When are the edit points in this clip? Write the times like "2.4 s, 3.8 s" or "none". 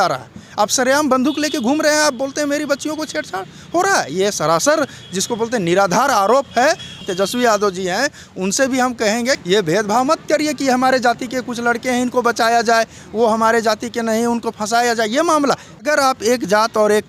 7.0 s, 9.4 s, 15.8 s